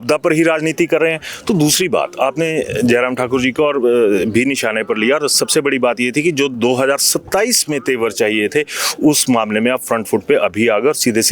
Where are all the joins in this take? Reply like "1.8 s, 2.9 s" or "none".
none